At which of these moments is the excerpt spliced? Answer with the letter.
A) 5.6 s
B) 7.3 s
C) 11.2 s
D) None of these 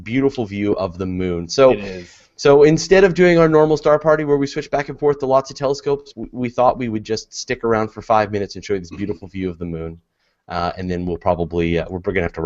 D